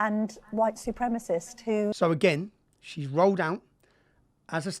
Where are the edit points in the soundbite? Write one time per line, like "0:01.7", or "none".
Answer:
0:02.0